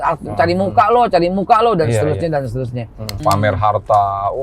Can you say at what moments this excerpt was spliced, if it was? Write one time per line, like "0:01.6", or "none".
0:03.1